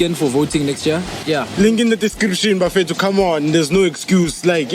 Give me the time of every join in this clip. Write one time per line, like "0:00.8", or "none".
0:01.2